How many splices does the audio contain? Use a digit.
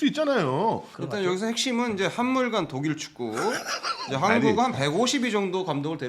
1